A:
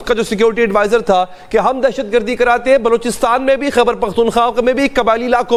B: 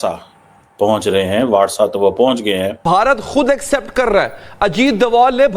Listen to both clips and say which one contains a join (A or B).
B